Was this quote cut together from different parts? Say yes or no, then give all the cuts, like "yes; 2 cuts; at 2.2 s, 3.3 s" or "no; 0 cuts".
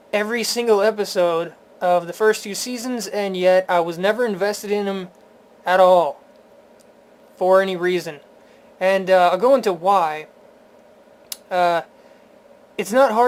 no; 0 cuts